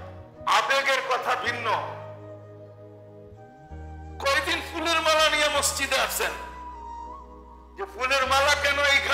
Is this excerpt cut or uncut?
cut